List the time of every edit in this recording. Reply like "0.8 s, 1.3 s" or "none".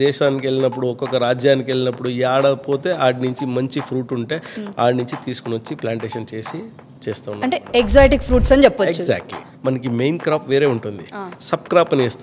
9.3 s